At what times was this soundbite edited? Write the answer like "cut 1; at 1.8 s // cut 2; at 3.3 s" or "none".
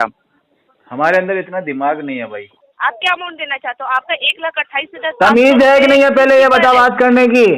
cut 1; at 2.6 s